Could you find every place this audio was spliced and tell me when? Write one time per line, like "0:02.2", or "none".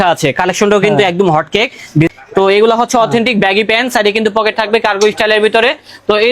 0:02.1